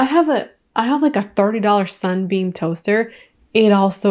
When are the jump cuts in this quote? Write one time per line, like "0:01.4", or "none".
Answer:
none